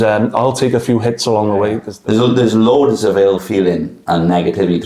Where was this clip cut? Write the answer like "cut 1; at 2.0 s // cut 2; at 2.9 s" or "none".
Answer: cut 1; at 1.9 s